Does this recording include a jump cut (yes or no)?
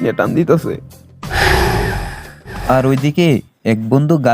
yes